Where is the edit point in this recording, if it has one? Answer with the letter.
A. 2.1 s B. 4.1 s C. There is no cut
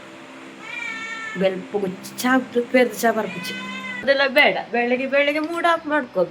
B